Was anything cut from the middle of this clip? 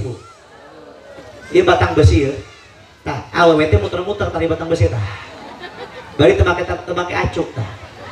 no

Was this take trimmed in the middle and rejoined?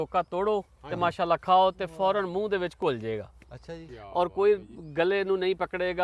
no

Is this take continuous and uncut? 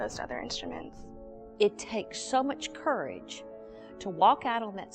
no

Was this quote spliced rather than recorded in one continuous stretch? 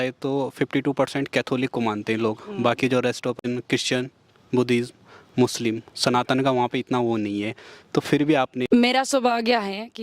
yes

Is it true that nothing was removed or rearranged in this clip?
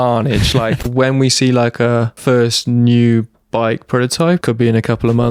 no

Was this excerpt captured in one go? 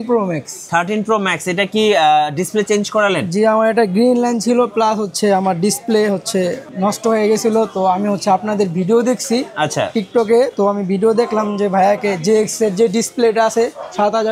no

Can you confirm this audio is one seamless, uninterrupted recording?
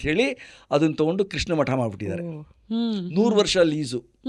yes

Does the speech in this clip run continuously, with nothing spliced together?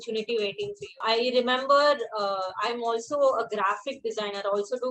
no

